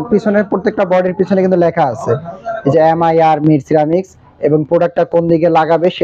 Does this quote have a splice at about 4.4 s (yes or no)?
no